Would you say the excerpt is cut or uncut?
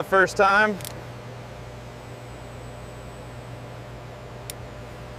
uncut